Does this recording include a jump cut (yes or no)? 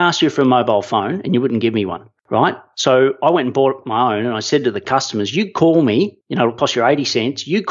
no